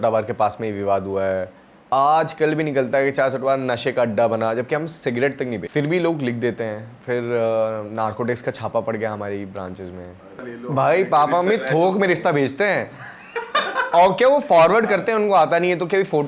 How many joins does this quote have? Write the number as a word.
two